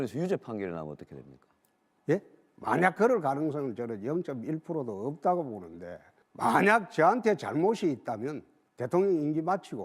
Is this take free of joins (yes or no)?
no